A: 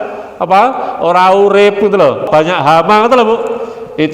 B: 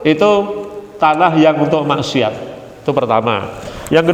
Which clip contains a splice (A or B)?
A